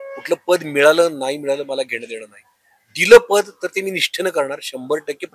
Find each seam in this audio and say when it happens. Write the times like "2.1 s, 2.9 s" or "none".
none